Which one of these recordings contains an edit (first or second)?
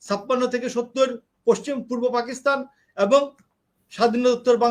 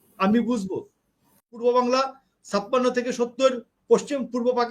second